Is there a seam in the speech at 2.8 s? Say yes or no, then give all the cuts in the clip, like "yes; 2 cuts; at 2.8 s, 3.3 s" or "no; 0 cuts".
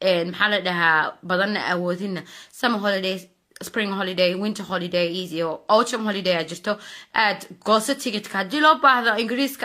yes; 1 cut; at 2.8 s